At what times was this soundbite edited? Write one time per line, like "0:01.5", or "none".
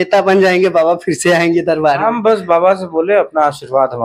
none